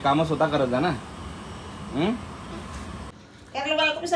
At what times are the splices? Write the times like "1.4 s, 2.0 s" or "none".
3.1 s